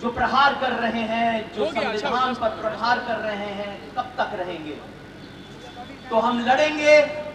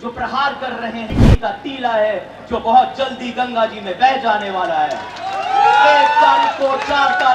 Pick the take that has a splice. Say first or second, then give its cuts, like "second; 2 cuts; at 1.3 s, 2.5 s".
second; 1 cut; at 1.1 s